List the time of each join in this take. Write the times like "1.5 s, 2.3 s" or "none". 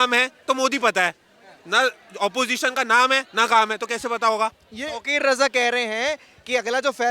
4.7 s